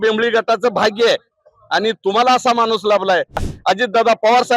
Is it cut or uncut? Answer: cut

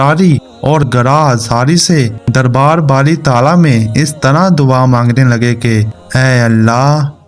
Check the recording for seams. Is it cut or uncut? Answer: uncut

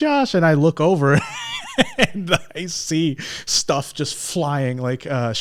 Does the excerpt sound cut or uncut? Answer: uncut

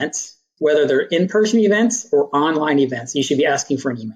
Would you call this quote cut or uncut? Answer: uncut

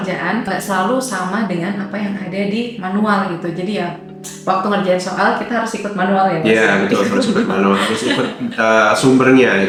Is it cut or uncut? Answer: uncut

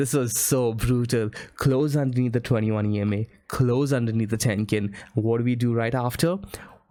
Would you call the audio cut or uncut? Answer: uncut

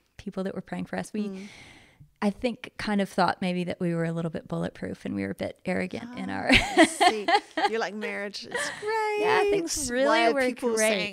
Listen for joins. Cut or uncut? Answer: uncut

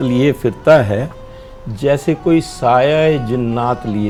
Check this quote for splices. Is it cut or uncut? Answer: uncut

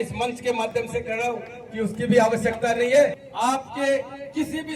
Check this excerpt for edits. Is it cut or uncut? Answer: cut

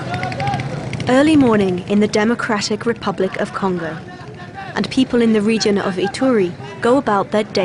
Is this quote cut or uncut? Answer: cut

